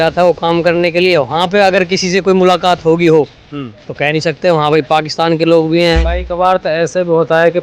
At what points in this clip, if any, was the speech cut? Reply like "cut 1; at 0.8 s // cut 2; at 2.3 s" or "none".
cut 1; at 6.1 s